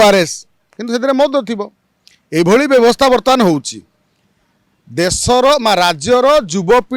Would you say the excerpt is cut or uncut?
uncut